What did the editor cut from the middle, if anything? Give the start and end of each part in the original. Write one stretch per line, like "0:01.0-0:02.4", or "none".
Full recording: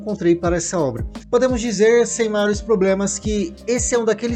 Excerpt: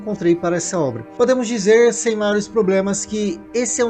0:01.0-0:01.2